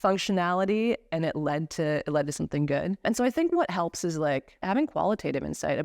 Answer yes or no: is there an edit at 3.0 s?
yes